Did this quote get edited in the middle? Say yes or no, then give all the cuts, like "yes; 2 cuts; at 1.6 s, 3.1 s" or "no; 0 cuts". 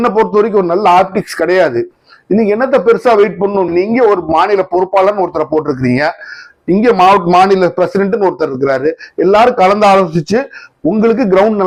no; 0 cuts